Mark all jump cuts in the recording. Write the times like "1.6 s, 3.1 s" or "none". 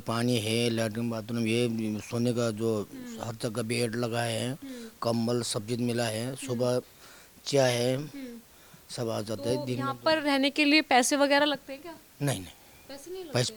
none